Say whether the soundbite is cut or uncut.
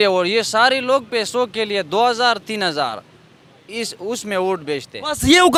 uncut